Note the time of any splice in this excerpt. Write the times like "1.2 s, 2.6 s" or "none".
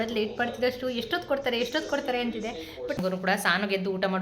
2.9 s